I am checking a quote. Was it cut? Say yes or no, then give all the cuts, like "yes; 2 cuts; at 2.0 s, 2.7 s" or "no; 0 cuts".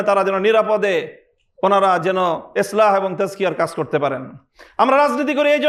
no; 0 cuts